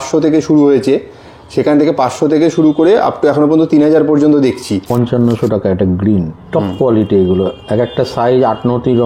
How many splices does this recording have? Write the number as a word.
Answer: one